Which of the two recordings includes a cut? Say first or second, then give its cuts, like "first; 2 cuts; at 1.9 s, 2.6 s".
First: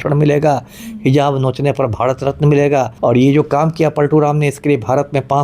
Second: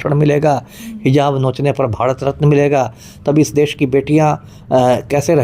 first; 1 cut; at 2.9 s